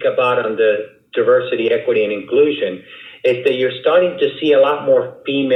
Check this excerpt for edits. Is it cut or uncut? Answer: uncut